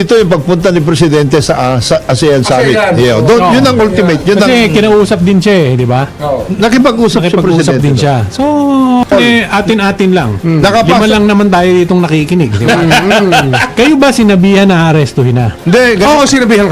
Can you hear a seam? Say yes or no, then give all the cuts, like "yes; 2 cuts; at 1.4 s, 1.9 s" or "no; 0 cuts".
yes; 1 cut; at 9.1 s